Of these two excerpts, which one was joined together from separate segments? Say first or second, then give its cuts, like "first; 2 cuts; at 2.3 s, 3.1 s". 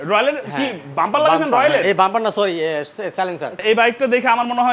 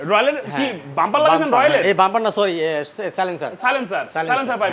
first; 1 cut; at 3.5 s